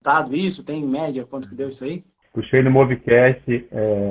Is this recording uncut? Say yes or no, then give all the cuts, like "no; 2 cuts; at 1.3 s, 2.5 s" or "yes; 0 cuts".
no; 1 cut; at 2.2 s